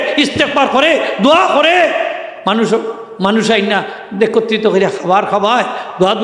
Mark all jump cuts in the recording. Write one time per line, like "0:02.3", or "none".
none